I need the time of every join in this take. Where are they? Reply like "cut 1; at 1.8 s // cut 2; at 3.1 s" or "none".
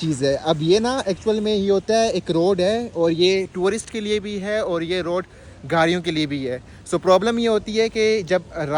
none